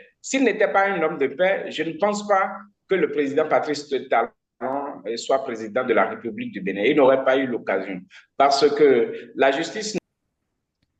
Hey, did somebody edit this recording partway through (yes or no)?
yes